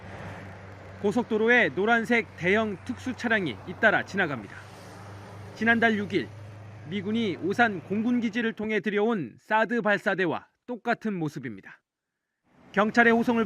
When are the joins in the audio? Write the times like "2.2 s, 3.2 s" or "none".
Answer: none

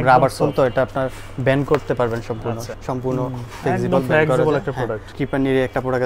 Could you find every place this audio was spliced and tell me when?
2.7 s, 5.1 s

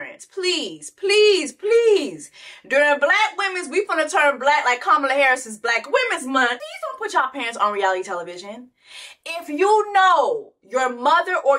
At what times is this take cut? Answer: none

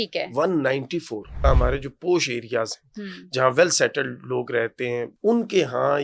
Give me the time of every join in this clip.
1.4 s, 5.1 s

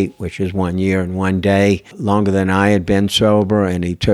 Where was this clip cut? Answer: 1.9 s

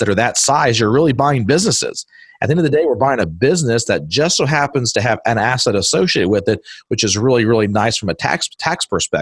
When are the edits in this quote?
none

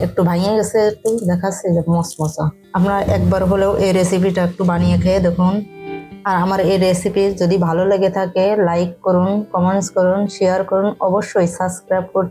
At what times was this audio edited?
none

